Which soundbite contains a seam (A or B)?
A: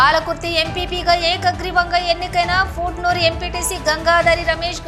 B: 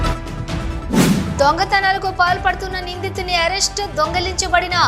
B